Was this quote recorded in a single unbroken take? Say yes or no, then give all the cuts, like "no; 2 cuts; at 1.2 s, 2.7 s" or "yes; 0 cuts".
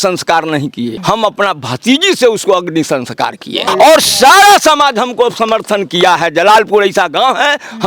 no; 2 cuts; at 1.0 s, 3.6 s